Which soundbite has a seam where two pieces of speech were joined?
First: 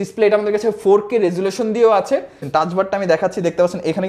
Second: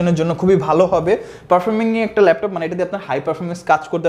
first; 1 cut; at 2.4 s

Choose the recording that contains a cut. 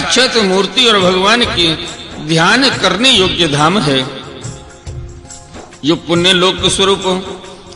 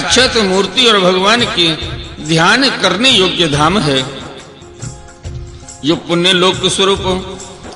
second; 2 cuts; at 4.2 s, 5.8 s

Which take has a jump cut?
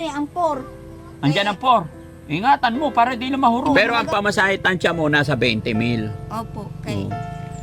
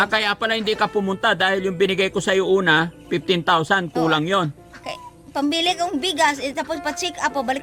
first; 1 cut; at 3.7 s

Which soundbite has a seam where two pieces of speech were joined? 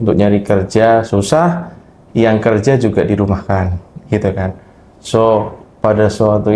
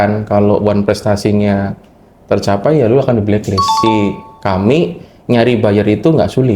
second; 1 cut; at 3.8 s

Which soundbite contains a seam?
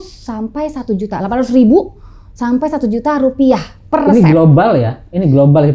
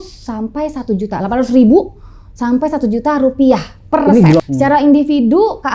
second; 1 cut; at 4.4 s

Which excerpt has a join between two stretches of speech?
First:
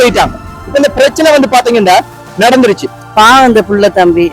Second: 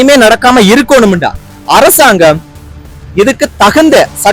first; 1 cut; at 2.9 s

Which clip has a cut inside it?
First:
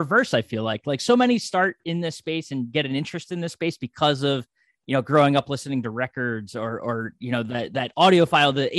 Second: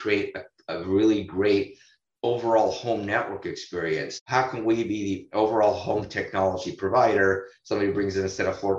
second; 1 cut; at 4.1 s

